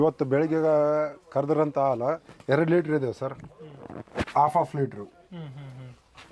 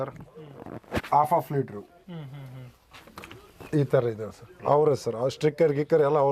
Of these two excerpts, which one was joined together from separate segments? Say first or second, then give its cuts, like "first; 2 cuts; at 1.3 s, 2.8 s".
second; 1 cut; at 4.6 s